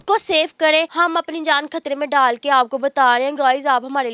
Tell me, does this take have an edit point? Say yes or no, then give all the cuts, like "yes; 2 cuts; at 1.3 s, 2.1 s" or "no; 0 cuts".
yes; 1 cut; at 0.9 s